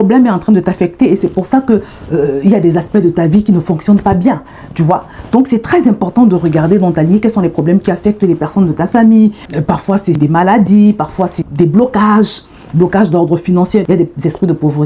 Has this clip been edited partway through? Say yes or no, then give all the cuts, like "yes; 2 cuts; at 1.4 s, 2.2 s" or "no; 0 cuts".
yes; 2 cuts; at 9.8 s, 11.4 s